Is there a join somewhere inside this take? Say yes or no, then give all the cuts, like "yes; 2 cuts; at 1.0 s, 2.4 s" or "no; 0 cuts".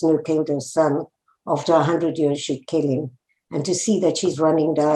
no; 0 cuts